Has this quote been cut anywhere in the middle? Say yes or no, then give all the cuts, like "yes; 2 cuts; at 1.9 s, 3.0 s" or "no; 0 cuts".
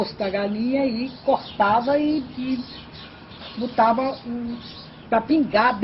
no; 0 cuts